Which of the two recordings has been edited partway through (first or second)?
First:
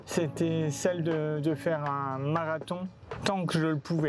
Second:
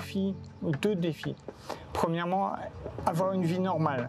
first